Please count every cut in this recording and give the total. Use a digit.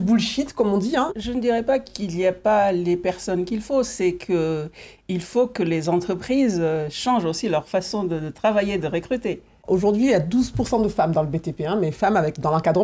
2